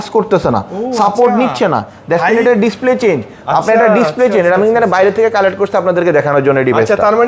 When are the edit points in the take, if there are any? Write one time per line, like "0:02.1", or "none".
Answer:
none